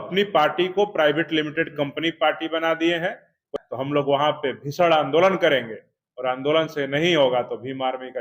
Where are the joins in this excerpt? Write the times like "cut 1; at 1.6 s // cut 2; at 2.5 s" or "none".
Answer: cut 1; at 3.5 s

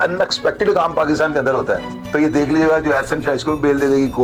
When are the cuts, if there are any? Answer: none

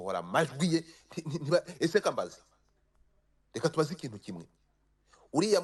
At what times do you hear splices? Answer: none

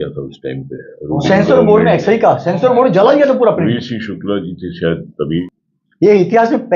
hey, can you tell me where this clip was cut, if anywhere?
cut 1; at 5.4 s

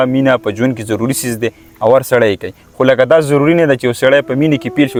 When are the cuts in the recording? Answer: none

